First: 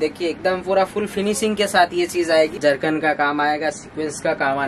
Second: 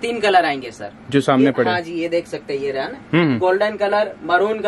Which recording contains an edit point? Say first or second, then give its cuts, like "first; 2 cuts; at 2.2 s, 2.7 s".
first; 1 cut; at 2.5 s